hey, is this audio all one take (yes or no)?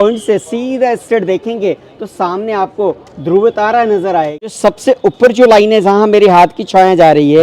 no